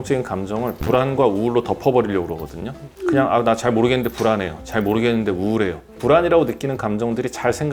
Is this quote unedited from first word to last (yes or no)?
yes